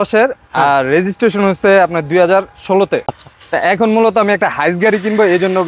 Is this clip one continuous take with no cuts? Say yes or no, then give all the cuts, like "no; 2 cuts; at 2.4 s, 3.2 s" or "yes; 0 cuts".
no; 1 cut; at 3.1 s